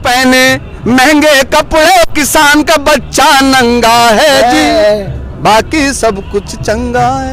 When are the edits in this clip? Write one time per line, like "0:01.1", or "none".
none